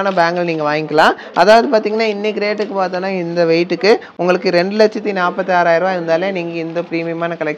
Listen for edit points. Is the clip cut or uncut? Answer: uncut